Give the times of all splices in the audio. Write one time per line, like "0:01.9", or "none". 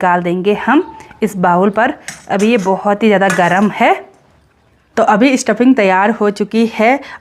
none